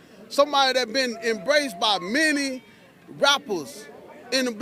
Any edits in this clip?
no; 0 cuts

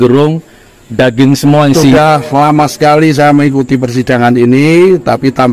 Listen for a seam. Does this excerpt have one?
yes; 1 cut; at 1.9 s

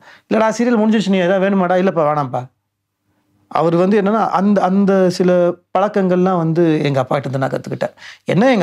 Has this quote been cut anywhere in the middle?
no; 0 cuts

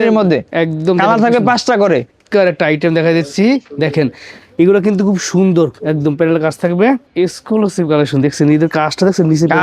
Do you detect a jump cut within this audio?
yes; 2 cuts; at 2.2 s, 7.1 s

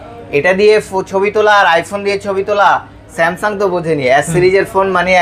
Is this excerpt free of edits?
yes; 0 cuts

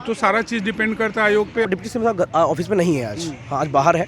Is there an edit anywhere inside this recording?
yes; 1 cut; at 1.7 s

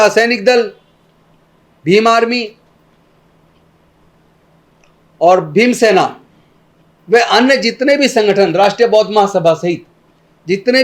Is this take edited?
no; 0 cuts

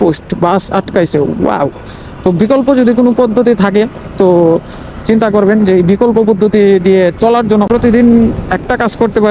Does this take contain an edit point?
yes; 1 cut; at 7.7 s

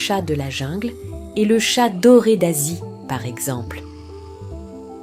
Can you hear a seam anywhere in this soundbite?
yes; 1 cut; at 3.6 s

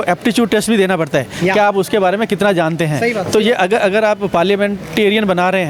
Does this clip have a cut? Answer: no; 0 cuts

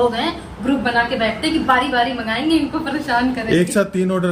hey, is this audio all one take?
yes; 0 cuts

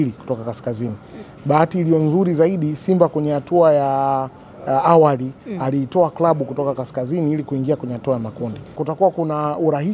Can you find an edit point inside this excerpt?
yes; 1 cut; at 8.8 s

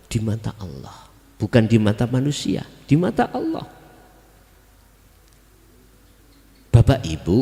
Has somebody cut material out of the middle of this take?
no; 0 cuts

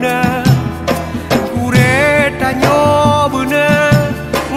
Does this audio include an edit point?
no; 0 cuts

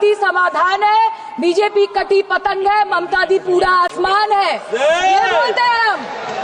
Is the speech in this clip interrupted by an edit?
no; 0 cuts

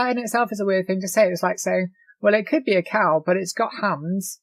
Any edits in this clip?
no; 0 cuts

